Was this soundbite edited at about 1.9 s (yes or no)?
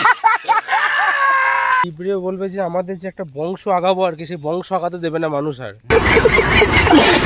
yes